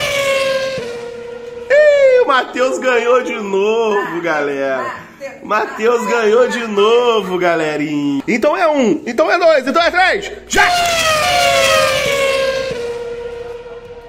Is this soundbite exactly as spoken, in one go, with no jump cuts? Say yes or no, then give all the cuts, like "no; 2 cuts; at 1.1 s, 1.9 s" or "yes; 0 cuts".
no; 1 cut; at 8.2 s